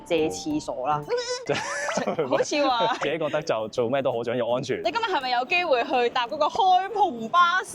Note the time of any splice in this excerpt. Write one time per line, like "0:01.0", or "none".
0:01.3
0:04.8